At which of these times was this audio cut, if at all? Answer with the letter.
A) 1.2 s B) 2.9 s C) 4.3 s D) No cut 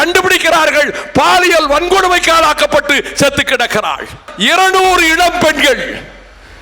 C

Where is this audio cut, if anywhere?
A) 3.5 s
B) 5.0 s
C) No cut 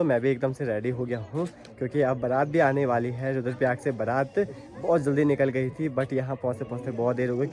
C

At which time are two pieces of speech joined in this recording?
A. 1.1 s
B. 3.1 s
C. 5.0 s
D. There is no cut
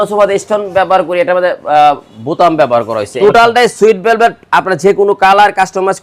B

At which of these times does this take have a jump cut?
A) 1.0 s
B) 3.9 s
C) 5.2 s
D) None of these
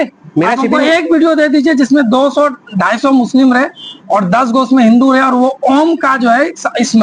D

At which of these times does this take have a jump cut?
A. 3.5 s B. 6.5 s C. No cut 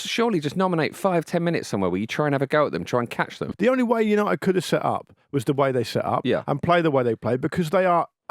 A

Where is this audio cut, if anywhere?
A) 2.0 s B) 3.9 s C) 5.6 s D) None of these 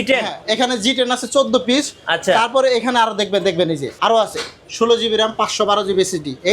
B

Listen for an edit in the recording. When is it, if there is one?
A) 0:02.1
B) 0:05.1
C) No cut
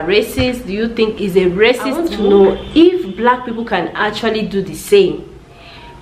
A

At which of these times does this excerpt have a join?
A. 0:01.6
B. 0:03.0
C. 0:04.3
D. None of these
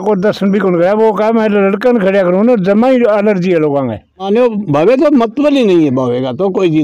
C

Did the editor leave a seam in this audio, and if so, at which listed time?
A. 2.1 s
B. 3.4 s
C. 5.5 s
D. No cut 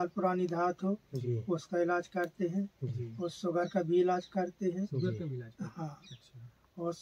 D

